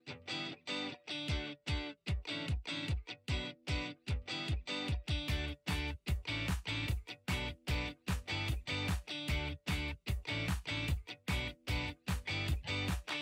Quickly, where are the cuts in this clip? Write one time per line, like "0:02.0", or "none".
none